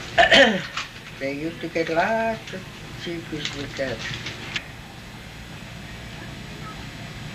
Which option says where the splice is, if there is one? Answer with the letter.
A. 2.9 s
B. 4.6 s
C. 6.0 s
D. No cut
D